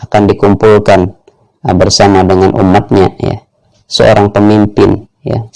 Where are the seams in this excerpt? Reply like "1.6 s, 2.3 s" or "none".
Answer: 3.7 s